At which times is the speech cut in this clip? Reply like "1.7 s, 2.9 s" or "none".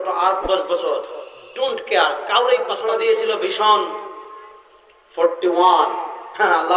2.8 s